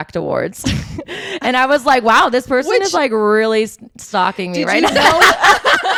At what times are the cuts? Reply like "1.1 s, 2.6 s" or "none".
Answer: none